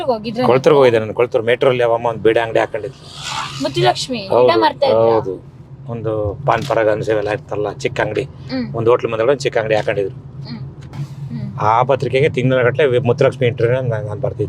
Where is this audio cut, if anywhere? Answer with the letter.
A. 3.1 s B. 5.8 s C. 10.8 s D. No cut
C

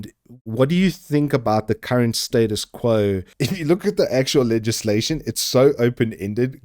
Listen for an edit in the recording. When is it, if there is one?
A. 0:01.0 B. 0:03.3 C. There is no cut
B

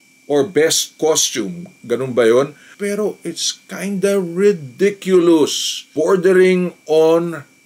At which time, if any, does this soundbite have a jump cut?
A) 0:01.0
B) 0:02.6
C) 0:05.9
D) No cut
B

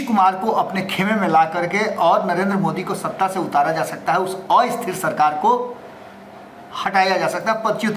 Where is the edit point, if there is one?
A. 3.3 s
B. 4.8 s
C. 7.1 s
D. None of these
D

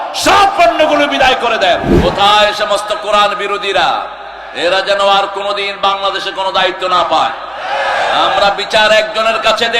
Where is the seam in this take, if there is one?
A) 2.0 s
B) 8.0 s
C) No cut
A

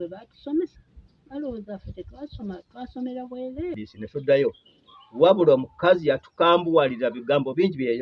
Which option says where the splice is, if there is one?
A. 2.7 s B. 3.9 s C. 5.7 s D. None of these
B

